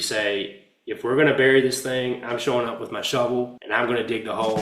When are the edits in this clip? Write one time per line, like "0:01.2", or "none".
0:03.6